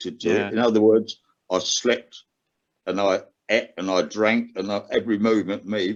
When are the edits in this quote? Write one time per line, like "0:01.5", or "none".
none